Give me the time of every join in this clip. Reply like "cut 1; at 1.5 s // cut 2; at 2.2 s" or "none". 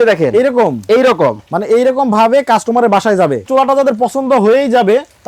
cut 1; at 3.5 s